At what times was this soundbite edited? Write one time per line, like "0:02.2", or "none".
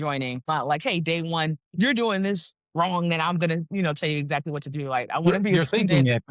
none